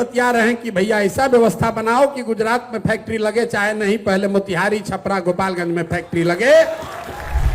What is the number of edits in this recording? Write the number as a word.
zero